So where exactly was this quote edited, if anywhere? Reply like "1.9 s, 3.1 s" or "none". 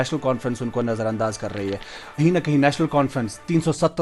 2.0 s